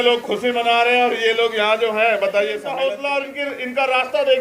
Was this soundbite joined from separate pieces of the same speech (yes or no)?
yes